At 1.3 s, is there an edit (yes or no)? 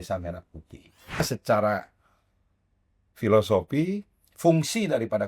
yes